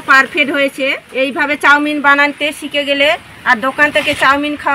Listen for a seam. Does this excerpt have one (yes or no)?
yes